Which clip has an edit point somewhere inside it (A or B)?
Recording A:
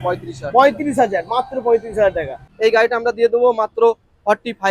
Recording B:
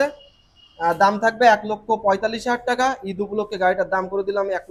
A